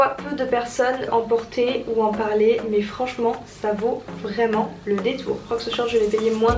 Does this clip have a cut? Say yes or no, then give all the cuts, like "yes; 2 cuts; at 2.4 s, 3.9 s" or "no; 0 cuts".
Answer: yes; 2 cuts; at 1.1 s, 5.4 s